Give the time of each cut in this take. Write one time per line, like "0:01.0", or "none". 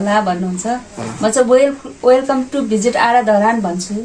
none